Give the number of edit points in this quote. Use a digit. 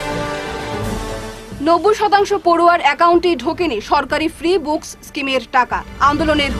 1